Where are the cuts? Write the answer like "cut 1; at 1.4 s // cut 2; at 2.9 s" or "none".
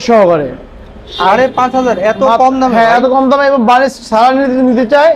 none

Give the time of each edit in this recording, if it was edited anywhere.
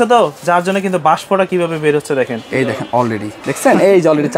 cut 1; at 3.3 s

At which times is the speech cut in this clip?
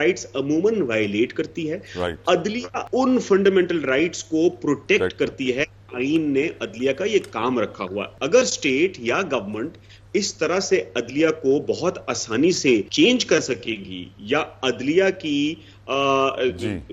cut 1; at 2.7 s // cut 2; at 8.0 s // cut 3; at 12.9 s

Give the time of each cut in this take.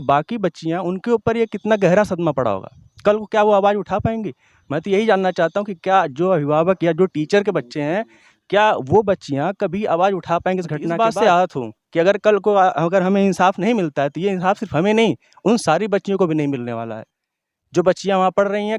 cut 1; at 11.0 s

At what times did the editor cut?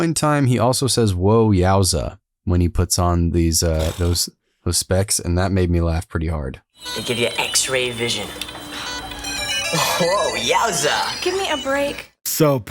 none

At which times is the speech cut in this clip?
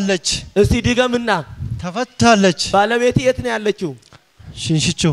none

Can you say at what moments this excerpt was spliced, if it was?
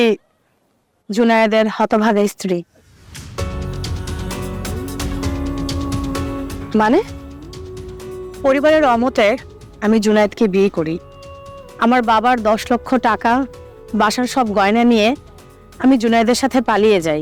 none

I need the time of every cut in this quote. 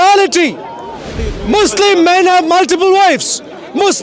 cut 1; at 1.2 s

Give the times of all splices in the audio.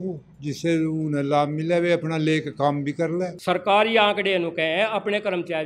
cut 1; at 3.4 s

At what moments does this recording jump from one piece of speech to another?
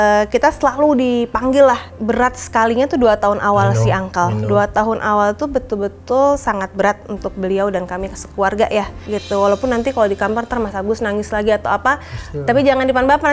cut 1; at 1.9 s // cut 2; at 9.1 s

